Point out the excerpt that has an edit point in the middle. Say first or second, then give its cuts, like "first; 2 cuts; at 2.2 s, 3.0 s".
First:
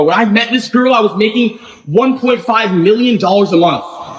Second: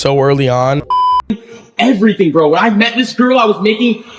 second; 1 cut; at 0.9 s